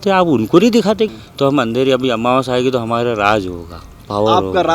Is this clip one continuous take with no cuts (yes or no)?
no